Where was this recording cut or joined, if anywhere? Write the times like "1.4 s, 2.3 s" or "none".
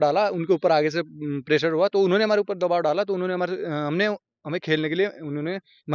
none